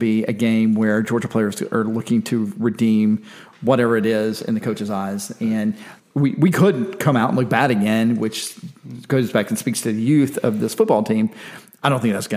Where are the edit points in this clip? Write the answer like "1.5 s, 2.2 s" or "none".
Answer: none